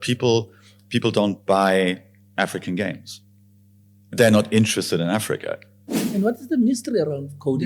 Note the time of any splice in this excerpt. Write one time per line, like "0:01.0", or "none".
0:06.0